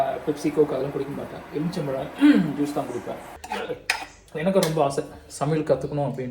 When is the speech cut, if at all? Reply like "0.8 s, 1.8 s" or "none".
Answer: 3.3 s